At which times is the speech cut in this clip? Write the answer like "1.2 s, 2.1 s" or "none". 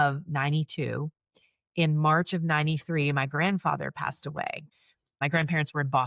5.1 s